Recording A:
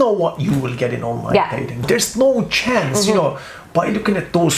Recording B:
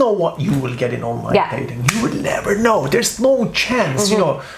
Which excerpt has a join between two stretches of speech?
A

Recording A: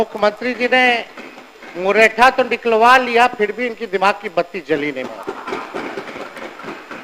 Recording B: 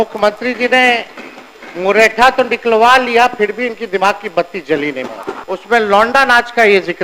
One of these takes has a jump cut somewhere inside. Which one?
B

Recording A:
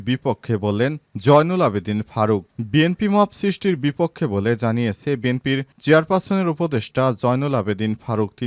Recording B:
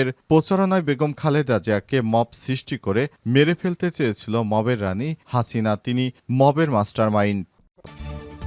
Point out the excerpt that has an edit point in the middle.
B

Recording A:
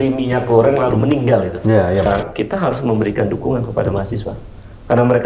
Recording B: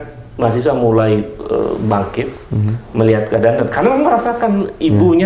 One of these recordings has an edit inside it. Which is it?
A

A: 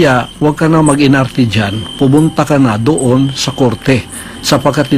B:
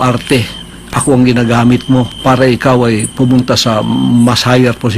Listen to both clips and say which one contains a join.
B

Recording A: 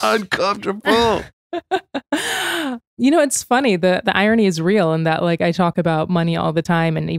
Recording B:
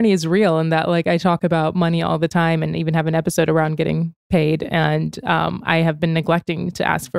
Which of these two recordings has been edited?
A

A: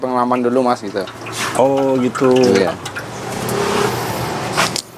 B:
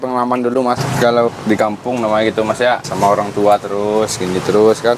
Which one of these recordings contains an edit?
B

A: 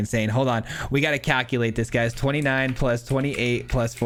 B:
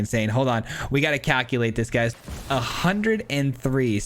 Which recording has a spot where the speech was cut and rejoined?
B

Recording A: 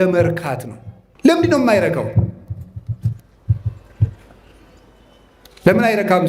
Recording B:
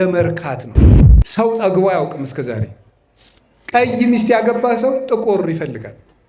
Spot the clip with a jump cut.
B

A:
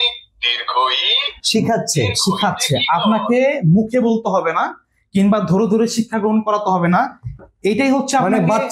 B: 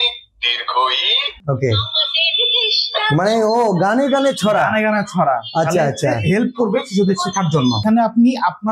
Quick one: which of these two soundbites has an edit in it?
B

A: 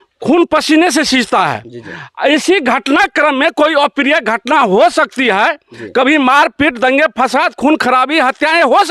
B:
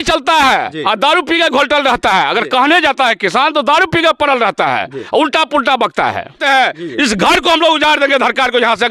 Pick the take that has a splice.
B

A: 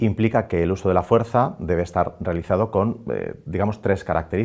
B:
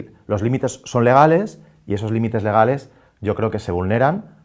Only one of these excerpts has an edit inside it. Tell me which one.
A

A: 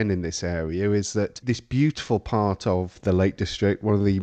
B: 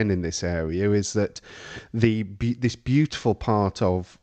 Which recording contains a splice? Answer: A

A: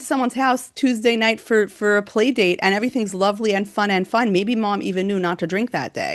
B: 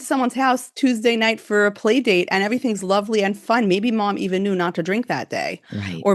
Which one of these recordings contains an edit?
B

